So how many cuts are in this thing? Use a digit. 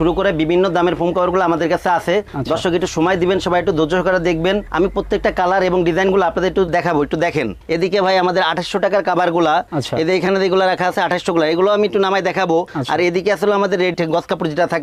0